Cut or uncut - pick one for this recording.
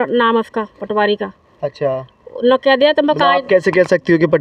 uncut